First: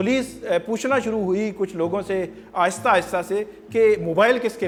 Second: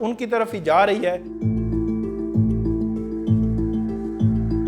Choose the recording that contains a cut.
second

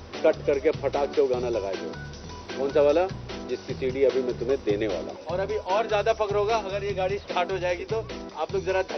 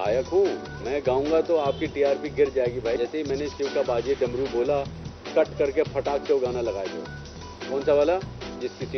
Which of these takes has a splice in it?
first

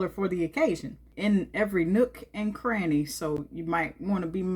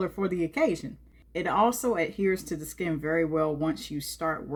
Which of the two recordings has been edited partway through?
first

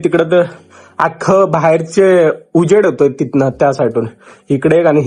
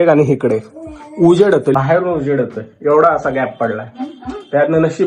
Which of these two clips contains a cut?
second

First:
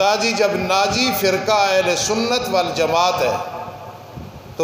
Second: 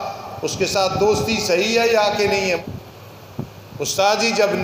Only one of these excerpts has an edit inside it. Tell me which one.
second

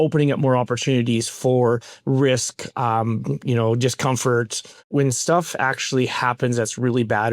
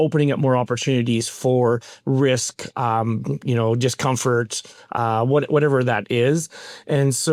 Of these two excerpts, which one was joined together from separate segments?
first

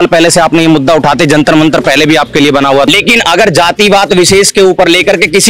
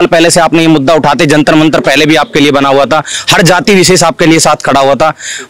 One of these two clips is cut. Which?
first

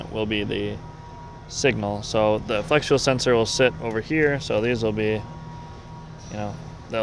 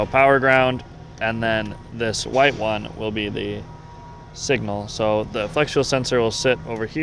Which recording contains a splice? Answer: second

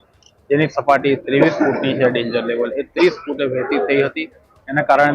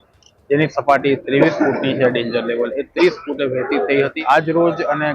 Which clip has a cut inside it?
second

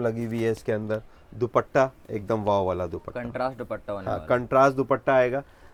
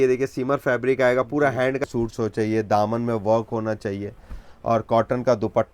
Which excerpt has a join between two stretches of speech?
second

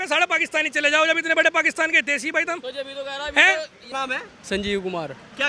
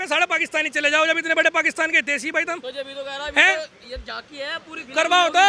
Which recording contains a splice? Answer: first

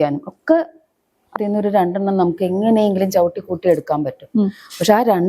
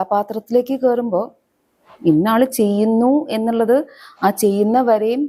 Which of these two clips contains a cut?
first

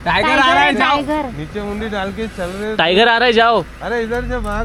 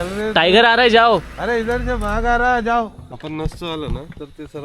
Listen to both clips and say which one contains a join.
second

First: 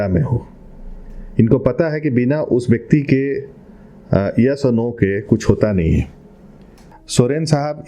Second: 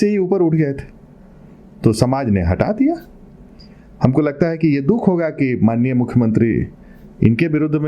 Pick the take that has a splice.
first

